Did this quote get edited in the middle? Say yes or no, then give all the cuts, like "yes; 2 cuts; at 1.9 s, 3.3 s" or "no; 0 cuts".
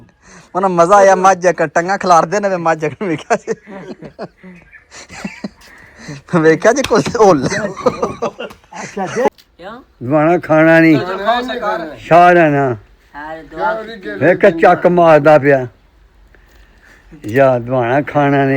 yes; 1 cut; at 9.3 s